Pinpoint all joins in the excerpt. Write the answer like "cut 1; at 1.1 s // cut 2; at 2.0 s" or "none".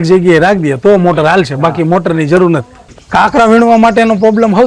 cut 1; at 2.9 s